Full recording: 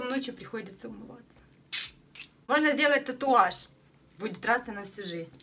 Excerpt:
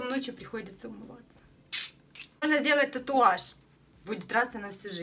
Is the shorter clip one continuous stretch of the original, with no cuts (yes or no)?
no